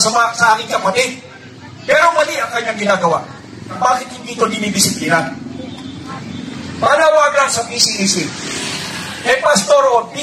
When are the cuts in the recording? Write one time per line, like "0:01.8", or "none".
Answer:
0:03.8